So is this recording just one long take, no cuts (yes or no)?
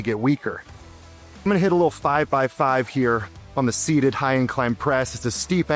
no